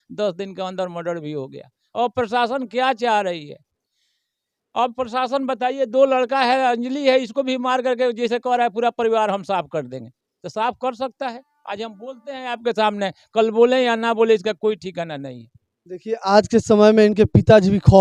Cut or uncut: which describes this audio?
uncut